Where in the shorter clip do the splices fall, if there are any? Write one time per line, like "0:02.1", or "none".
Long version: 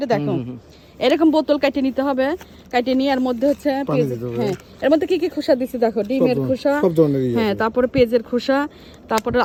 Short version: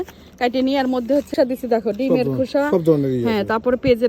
0:01.3